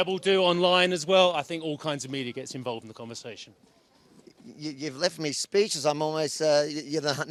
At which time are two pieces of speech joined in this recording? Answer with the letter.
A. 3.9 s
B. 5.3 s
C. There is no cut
C